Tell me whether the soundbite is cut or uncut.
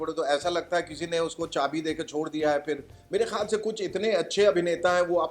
cut